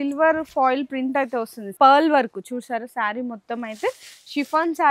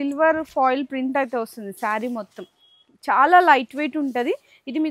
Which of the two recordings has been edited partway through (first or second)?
first